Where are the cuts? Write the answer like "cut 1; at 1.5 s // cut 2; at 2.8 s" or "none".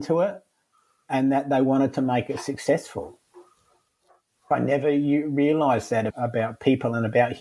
cut 1; at 4.5 s // cut 2; at 6.1 s